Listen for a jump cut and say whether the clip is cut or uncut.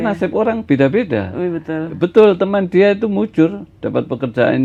uncut